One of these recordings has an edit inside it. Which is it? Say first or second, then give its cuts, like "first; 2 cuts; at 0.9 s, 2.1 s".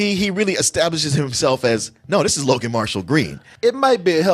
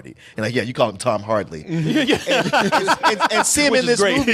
first; 1 cut; at 3.4 s